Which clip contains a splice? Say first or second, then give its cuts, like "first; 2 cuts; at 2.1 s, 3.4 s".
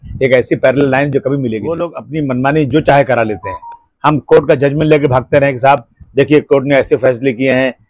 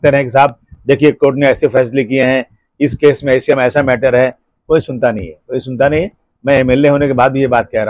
first; 1 cut; at 2.0 s